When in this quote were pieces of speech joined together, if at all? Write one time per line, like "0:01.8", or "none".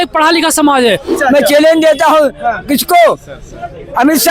0:01.1

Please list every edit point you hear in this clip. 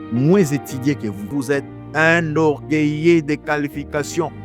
0:01.2

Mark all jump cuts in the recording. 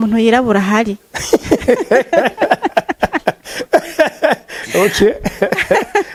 none

